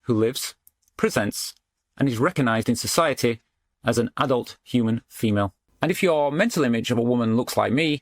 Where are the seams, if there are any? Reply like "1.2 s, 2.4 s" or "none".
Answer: 5.6 s